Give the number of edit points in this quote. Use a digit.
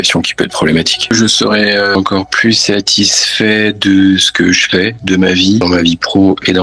3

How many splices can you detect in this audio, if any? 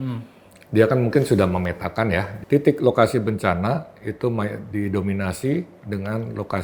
1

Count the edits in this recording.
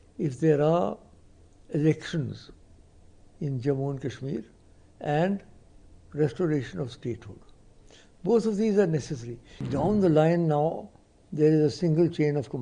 1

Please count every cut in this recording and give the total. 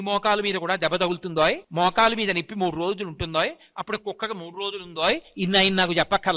1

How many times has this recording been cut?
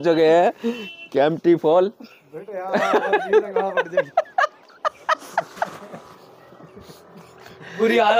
0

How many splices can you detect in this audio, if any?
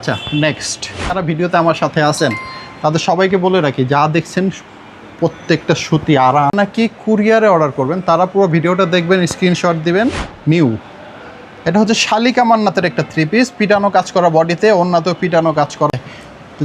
4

